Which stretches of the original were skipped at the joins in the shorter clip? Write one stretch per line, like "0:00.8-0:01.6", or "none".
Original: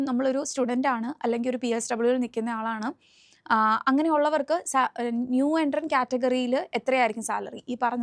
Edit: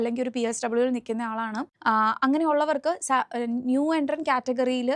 0:02.9-0:03.3